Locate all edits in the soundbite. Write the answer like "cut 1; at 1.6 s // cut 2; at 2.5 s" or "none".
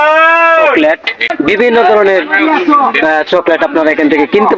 cut 1; at 1.3 s